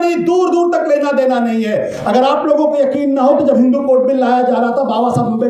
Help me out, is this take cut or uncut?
uncut